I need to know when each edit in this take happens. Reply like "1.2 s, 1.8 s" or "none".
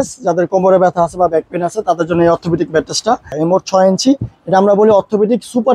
3.3 s